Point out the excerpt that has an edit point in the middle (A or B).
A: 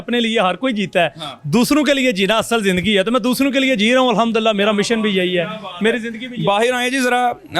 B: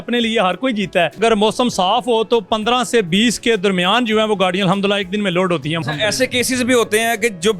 B